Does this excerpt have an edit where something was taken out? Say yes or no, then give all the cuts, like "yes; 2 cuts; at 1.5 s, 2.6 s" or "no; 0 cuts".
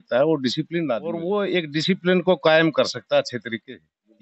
yes; 1 cut; at 1.1 s